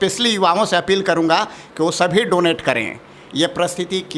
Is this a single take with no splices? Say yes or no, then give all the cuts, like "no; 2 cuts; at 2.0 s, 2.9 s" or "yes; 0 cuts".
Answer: yes; 0 cuts